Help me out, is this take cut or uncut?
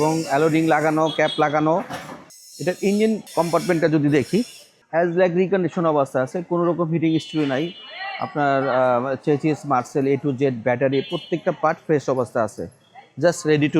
uncut